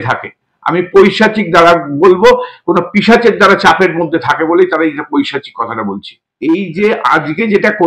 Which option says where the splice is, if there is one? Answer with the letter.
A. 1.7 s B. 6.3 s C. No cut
B